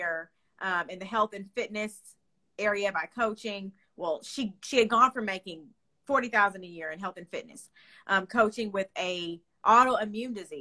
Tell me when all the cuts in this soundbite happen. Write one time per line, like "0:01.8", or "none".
none